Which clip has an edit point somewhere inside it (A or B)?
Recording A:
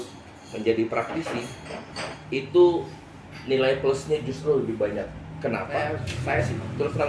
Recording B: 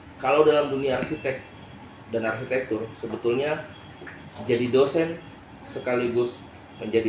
A